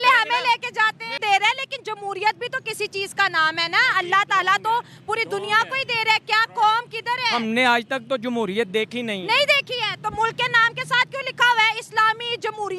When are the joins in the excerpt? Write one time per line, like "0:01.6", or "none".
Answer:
0:01.2